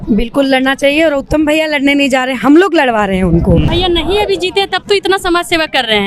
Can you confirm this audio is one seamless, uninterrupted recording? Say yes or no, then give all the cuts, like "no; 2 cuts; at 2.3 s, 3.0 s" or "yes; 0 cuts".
no; 1 cut; at 3.7 s